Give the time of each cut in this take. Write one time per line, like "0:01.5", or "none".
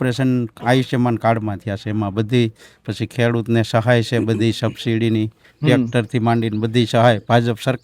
none